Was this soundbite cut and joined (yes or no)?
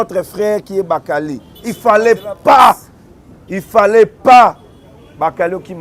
no